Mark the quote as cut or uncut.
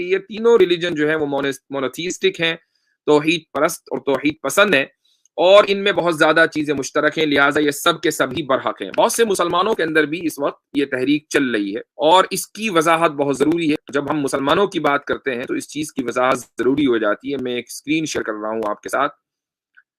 cut